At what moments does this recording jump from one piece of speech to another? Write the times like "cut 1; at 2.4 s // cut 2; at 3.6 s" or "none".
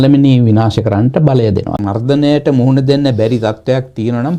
cut 1; at 1.8 s